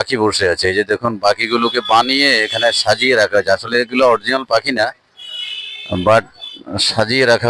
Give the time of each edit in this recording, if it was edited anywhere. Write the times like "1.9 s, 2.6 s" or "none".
none